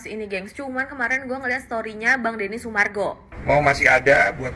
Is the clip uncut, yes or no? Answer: no